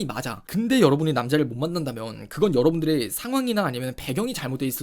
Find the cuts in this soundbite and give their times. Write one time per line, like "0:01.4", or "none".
none